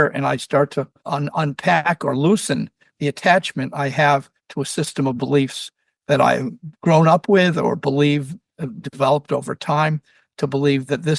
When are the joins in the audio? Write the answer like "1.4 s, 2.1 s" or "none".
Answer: 1.0 s